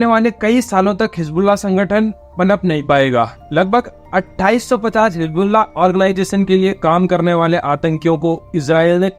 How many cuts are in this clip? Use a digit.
0